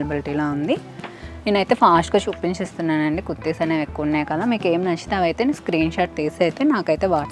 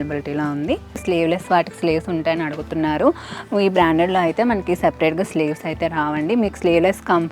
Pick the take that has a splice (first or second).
second